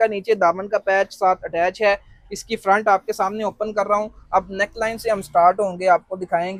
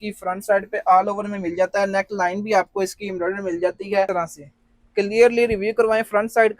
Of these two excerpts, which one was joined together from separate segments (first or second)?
second